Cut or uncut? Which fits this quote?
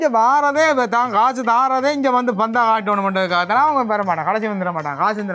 uncut